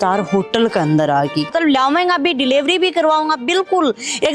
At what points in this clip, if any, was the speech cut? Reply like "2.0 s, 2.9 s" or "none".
1.5 s